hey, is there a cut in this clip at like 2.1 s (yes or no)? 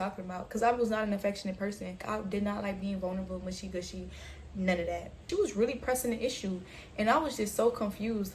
yes